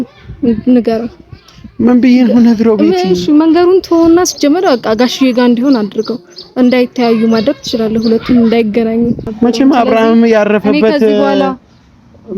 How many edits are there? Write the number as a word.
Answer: one